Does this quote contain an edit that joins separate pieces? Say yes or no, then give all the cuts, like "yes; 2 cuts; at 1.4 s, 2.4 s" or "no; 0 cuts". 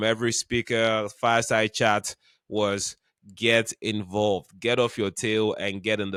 no; 0 cuts